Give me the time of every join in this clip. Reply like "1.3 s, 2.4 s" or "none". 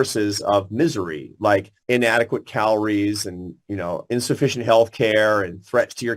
1.7 s